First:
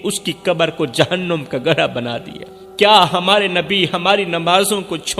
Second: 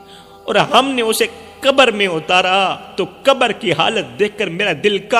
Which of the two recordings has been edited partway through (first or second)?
first